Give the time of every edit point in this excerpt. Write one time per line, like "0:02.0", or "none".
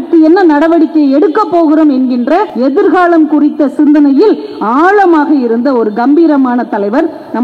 0:02.5